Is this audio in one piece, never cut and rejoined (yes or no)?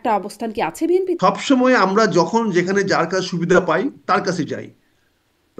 no